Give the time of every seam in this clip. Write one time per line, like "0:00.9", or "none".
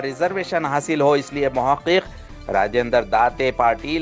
none